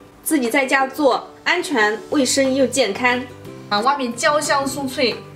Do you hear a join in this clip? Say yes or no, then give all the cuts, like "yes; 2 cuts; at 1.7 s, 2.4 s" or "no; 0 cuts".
yes; 1 cut; at 3.7 s